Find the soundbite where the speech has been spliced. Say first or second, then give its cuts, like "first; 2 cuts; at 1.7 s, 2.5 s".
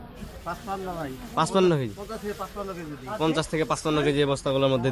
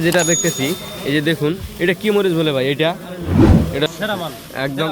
second; 2 cuts; at 3.2 s, 3.7 s